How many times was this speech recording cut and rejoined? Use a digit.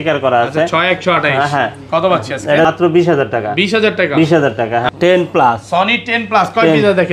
2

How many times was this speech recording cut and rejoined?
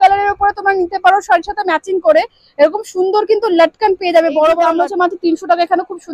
1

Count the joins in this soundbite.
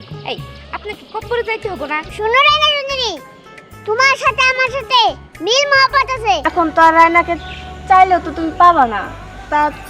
2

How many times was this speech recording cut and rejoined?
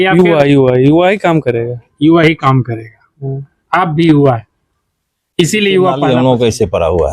1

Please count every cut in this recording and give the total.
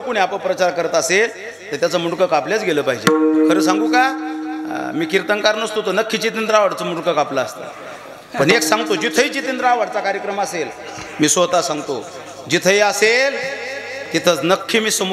0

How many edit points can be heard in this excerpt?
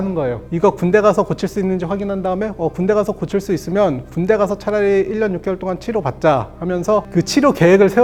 0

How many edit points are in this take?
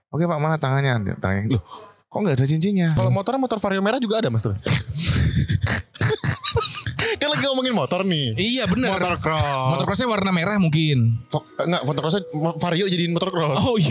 1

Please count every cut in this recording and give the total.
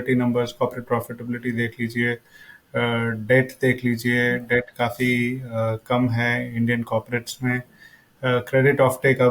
0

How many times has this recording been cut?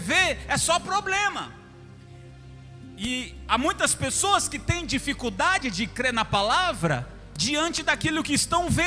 0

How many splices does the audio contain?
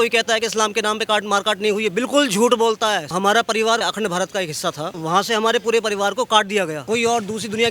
4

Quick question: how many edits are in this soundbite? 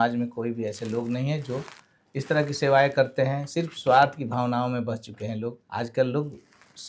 1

